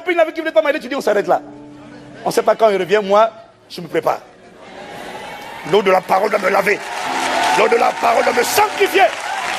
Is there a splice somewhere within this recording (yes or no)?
no